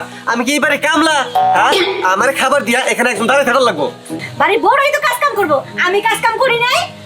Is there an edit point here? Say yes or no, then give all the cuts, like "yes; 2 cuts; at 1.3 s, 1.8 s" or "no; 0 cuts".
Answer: yes; 1 cut; at 4.2 s